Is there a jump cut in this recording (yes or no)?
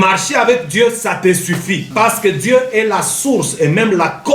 yes